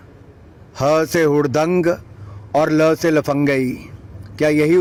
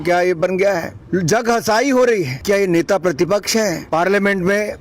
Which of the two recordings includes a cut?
second; 3 cuts; at 0.9 s, 2.4 s, 3.8 s

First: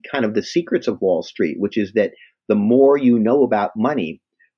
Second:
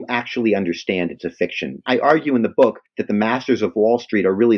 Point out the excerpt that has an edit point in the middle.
second; 2 cuts; at 1.8 s, 2.9 s

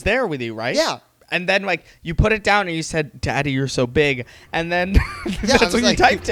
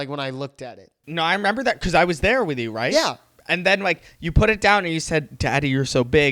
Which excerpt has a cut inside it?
second; 1 cut; at 1.0 s

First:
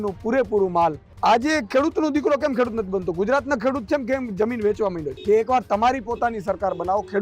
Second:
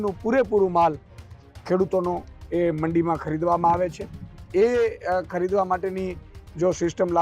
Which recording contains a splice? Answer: first; 2 cuts; at 1.1 s, 5.1 s

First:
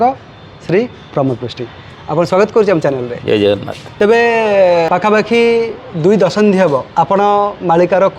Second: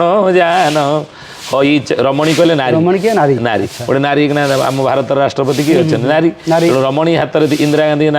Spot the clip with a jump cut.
first; 3 cuts; at 3.8 s, 4.9 s, 6.9 s

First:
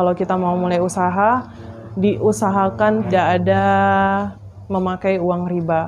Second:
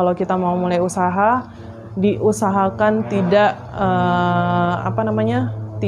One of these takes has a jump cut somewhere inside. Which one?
first; 1 cut; at 3.1 s

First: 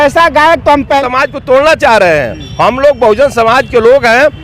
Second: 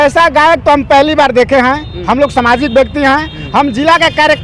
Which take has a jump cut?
first; 1 cut; at 1.0 s

